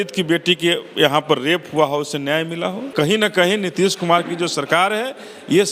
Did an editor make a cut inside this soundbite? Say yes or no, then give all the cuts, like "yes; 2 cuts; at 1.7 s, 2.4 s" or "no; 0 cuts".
yes; 1 cut; at 2.8 s